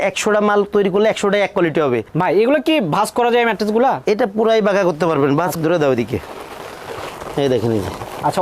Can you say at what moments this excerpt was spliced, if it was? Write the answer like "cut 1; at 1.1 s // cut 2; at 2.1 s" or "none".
cut 1; at 2.1 s // cut 2; at 5.5 s